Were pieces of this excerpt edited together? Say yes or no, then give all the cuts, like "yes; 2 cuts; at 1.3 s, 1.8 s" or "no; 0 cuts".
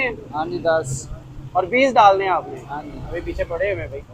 no; 0 cuts